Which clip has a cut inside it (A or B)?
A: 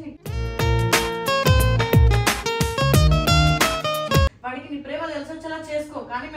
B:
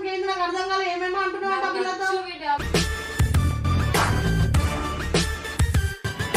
A